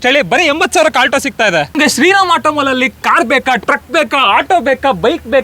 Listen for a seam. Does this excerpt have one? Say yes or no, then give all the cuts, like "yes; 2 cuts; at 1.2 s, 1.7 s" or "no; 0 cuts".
yes; 1 cut; at 1.7 s